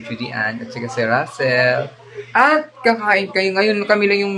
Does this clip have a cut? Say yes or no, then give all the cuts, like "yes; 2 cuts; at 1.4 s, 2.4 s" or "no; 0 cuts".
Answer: no; 0 cuts